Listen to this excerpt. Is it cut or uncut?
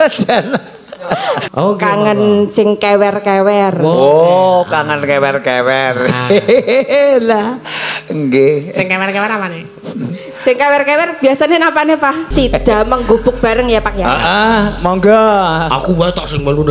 cut